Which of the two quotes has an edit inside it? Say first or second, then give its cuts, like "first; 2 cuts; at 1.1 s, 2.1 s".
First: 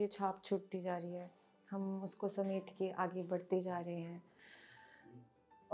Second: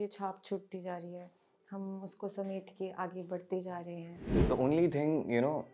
second; 1 cut; at 4.3 s